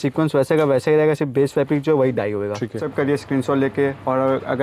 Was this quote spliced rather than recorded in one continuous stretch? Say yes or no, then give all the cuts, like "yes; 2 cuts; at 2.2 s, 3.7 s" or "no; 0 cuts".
yes; 1 cut; at 2.8 s